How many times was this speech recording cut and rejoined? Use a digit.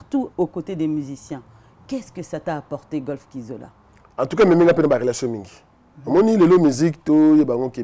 0